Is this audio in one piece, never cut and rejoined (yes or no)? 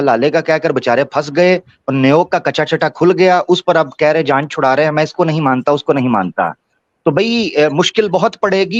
yes